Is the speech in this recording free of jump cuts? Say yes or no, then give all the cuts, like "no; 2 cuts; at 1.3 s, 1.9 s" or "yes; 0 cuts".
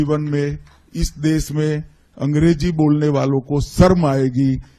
yes; 0 cuts